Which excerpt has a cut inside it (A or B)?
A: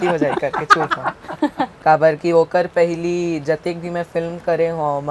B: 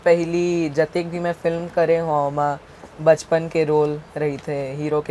A